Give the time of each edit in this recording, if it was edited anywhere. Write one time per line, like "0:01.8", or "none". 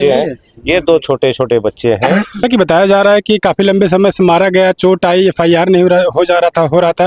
0:02.4